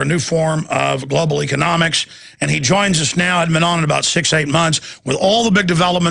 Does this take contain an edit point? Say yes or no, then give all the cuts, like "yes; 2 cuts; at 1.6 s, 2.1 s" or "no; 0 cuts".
yes; 1 cut; at 1.7 s